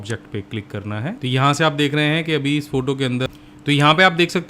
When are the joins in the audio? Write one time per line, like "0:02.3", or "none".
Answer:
0:03.3